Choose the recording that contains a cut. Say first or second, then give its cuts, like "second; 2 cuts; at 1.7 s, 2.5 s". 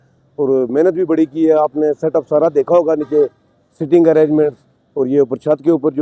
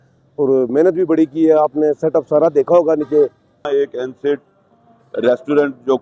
second; 1 cut; at 3.7 s